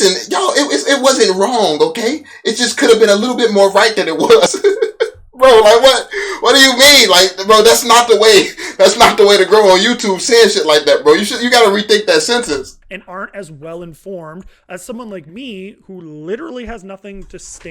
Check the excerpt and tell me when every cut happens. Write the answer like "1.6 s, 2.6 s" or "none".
none